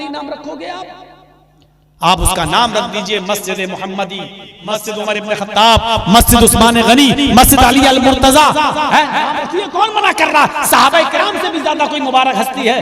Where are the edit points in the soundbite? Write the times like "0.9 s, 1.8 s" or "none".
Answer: 4.5 s